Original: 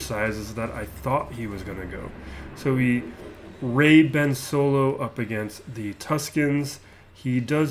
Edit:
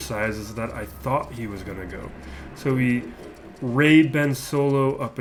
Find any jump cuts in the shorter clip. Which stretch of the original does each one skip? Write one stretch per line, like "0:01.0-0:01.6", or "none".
none